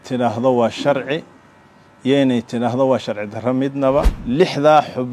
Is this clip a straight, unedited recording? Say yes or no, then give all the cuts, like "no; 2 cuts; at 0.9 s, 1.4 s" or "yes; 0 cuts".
no; 1 cut; at 4.2 s